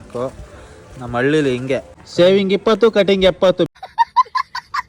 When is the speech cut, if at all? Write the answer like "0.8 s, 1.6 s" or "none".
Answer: 2.1 s, 3.7 s